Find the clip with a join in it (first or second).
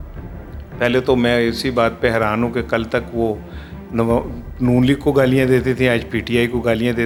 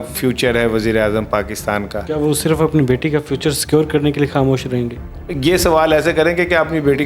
second